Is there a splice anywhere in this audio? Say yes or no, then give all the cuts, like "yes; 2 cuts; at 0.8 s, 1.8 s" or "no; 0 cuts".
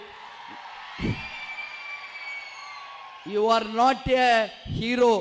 no; 0 cuts